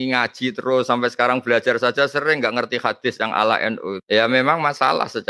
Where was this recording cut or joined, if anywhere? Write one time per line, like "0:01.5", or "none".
0:04.0